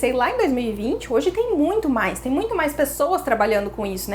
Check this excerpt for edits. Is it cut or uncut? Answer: uncut